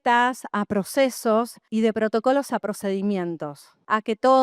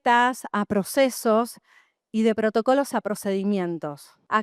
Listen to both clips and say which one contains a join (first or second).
first